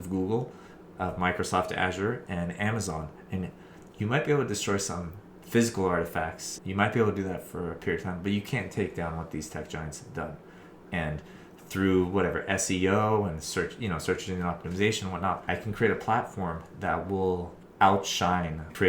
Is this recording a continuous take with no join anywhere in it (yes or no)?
no